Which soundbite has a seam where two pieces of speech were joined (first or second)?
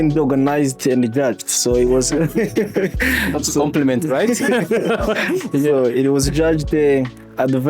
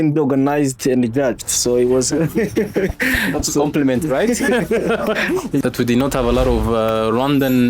second